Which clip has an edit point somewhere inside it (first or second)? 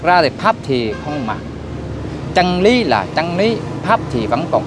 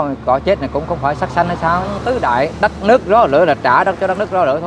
second